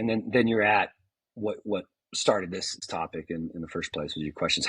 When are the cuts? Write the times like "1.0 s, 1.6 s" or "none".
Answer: 2.8 s